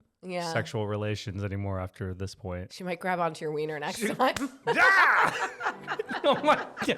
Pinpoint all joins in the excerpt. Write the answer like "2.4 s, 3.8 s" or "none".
2.7 s